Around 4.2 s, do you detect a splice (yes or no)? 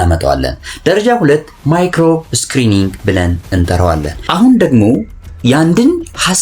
yes